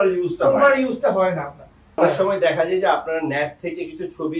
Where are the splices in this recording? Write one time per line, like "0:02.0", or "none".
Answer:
0:02.0